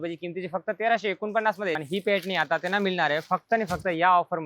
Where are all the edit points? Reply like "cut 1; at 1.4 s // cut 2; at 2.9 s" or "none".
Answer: cut 1; at 1.8 s

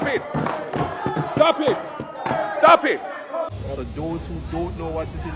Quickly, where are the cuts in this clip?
cut 1; at 3.5 s

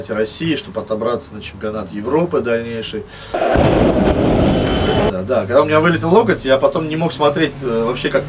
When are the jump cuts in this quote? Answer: cut 1; at 3.4 s // cut 2; at 5.1 s

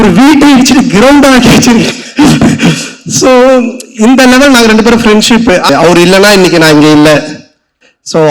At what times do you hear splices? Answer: cut 1; at 5.7 s

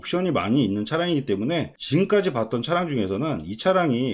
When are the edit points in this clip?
cut 1; at 1.8 s

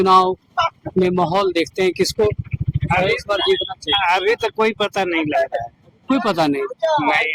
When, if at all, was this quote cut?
none

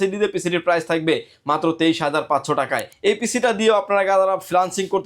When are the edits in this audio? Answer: cut 1; at 2.9 s

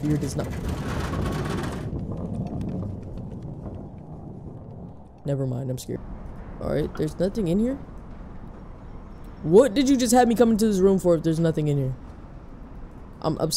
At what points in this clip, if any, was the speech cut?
cut 1; at 6.0 s

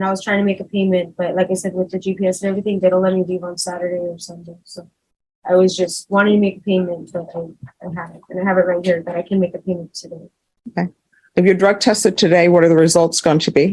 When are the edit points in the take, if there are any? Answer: none

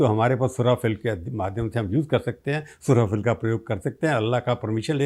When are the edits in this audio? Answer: none

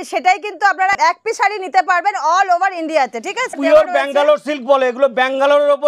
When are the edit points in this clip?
cut 1; at 1.0 s // cut 2; at 3.5 s

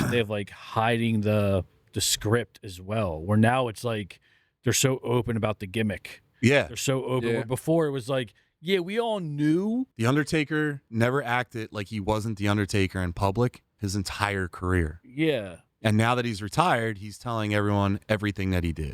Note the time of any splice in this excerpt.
cut 1; at 9.9 s

